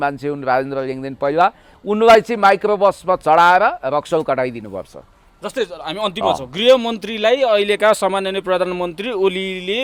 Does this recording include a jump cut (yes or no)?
no